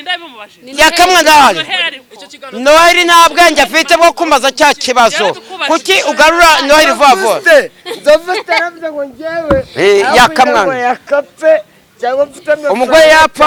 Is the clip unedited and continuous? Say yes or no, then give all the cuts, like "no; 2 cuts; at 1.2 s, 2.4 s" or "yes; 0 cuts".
yes; 0 cuts